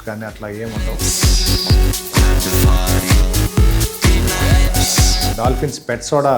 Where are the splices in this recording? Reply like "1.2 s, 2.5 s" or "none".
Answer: 0.9 s, 5.3 s